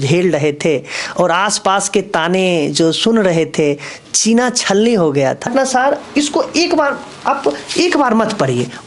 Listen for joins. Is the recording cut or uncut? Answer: cut